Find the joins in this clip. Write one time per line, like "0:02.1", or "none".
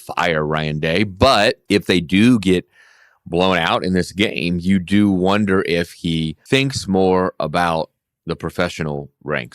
0:01.6
0:06.3